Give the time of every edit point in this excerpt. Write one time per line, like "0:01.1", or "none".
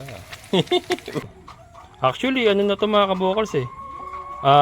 0:01.2